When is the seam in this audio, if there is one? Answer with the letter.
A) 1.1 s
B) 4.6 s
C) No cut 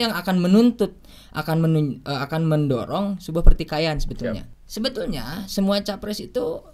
B